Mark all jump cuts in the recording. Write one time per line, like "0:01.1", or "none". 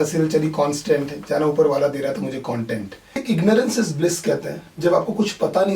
0:03.2